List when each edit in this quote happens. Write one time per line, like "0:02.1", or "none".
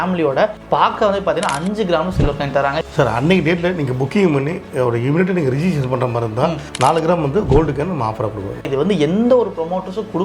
0:02.8
0:08.7